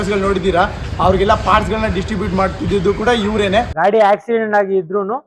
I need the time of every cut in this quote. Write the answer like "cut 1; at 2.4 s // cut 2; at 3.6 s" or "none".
cut 1; at 3.7 s